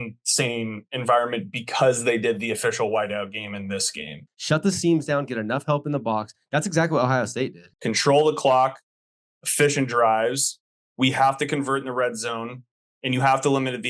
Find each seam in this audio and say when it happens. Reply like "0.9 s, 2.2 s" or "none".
4.2 s, 7.7 s